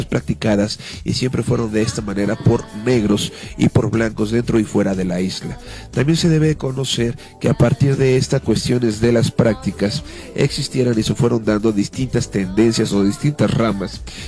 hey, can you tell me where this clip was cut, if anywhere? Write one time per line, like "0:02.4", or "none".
none